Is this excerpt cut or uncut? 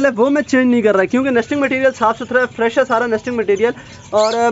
uncut